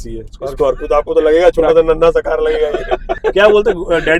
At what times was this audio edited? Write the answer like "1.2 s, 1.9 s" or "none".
3.2 s